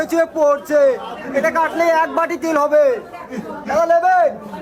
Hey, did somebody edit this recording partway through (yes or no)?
no